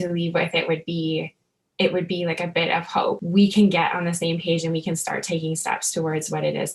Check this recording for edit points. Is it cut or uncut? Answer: cut